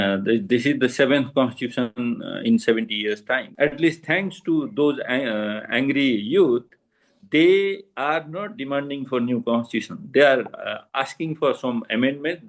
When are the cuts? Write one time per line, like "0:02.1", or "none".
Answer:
0:03.5